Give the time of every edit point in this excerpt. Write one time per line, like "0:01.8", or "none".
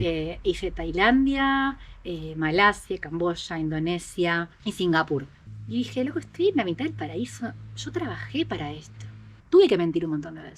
0:05.4
0:09.3